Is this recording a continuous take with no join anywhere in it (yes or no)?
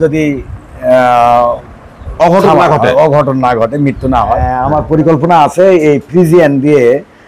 no